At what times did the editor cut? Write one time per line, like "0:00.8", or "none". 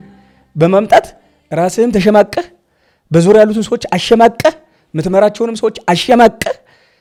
none